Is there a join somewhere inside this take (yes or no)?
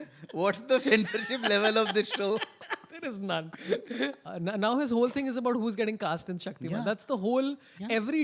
yes